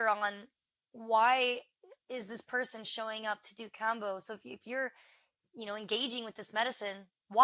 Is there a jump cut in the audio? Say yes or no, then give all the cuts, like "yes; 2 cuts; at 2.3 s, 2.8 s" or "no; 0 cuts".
no; 0 cuts